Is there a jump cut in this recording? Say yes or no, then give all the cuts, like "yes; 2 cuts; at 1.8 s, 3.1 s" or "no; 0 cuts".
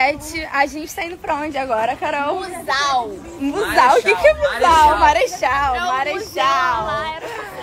no; 0 cuts